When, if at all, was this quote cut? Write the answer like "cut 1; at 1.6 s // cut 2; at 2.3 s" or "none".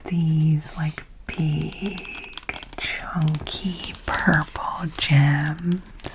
none